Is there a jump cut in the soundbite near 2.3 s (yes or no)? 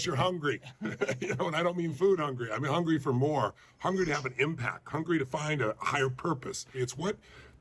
yes